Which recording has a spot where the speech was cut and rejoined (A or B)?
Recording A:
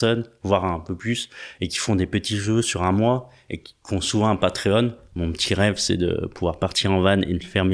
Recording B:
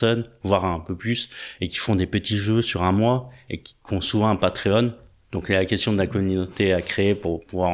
A